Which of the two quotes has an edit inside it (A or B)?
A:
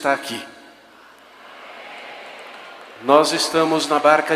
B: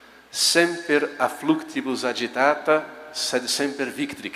A